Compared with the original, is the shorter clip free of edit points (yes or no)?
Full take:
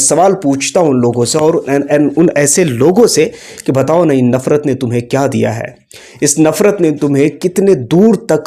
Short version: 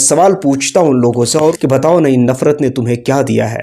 no